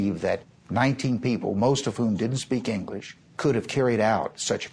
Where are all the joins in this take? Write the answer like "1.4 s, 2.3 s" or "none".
3.4 s